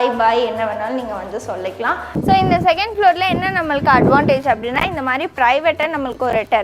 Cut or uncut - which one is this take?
cut